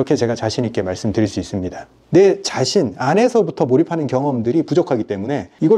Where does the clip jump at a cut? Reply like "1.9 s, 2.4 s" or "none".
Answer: 2.0 s